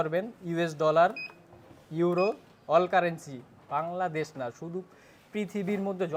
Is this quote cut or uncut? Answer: uncut